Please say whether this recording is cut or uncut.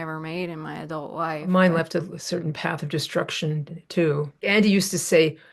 cut